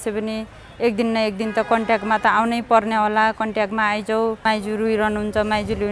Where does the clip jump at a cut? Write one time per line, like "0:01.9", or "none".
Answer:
0:04.4